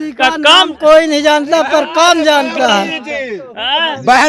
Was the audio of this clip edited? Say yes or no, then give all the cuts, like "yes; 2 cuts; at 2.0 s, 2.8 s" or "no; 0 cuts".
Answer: no; 0 cuts